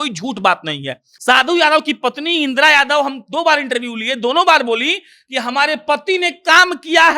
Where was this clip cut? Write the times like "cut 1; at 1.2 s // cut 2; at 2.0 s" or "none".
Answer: cut 1; at 1.1 s